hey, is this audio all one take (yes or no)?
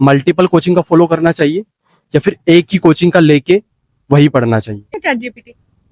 no